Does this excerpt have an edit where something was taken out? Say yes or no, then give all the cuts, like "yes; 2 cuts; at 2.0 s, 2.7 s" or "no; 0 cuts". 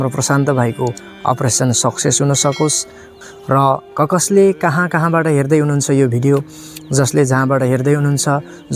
yes; 1 cut; at 3.0 s